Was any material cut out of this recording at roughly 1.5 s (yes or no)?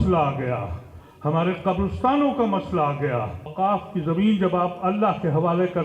no